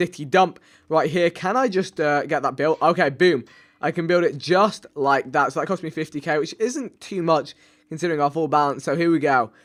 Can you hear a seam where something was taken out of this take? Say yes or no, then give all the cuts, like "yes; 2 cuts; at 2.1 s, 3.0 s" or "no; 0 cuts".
no; 0 cuts